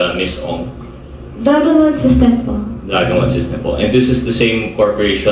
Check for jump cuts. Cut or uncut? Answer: uncut